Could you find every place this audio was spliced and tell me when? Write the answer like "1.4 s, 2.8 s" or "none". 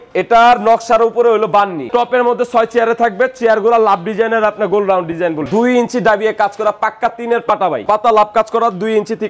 1.9 s, 5.5 s, 7.8 s

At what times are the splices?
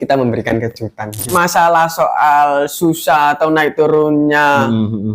1.2 s

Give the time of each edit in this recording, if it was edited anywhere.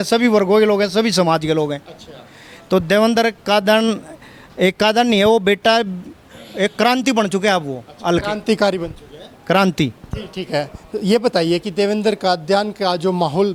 none

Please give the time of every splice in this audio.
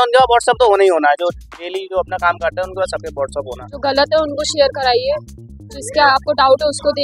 3.6 s

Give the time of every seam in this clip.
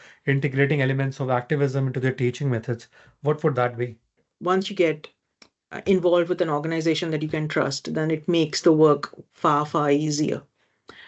4.3 s

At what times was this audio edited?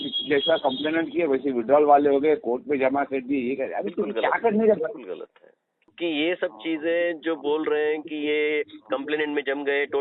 5.8 s

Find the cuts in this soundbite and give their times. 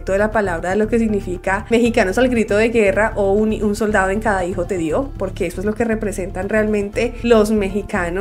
none

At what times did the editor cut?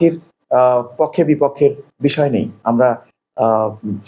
none

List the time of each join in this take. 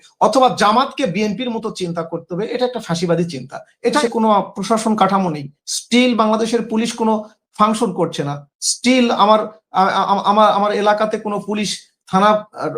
4.0 s

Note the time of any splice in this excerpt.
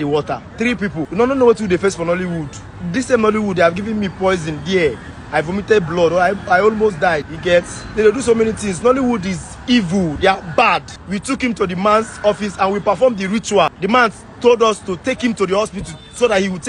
1.0 s, 7.3 s, 10.9 s, 13.7 s

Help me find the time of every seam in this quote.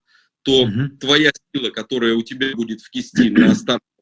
none

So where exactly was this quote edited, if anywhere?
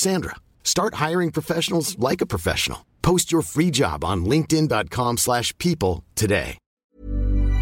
6.7 s

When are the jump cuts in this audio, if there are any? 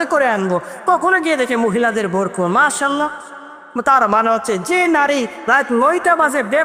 none

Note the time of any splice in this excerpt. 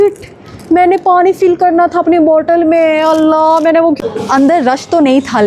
4.0 s

